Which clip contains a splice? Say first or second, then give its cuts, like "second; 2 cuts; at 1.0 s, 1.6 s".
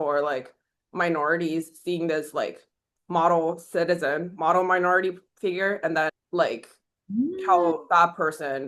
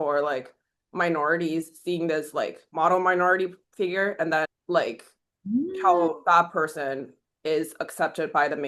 second; 1 cut; at 2.6 s